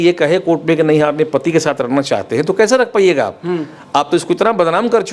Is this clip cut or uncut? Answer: uncut